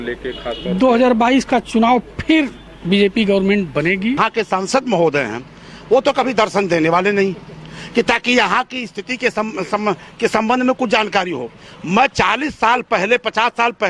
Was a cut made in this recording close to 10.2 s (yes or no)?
no